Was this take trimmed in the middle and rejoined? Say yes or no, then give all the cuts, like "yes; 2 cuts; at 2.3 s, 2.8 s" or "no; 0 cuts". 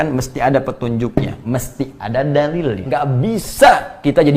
yes; 1 cut; at 2.8 s